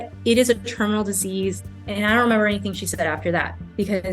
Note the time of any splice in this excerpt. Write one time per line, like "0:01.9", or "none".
0:01.6